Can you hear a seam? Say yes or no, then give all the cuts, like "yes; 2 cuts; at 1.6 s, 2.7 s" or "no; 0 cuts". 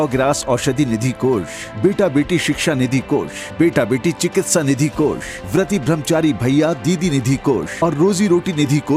no; 0 cuts